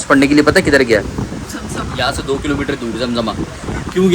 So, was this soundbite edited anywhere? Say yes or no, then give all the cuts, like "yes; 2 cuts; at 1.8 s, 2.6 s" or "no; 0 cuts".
no; 0 cuts